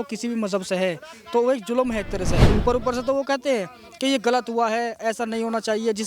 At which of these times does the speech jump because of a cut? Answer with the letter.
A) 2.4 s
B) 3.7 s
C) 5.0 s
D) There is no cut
A